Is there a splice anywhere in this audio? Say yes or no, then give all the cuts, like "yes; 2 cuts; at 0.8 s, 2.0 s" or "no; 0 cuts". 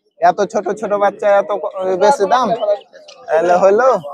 no; 0 cuts